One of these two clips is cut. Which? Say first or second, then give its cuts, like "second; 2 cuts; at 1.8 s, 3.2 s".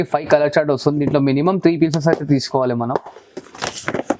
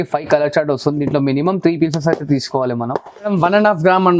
second; 1 cut; at 3.2 s